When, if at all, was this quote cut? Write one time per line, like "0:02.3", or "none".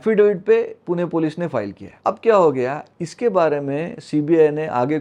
0:01.8